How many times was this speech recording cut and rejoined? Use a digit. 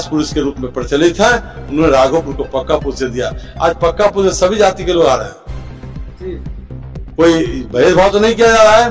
0